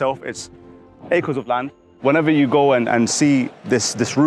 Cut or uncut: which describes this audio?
cut